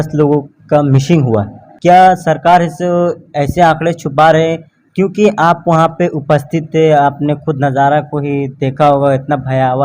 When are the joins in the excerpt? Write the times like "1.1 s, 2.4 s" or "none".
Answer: 1.6 s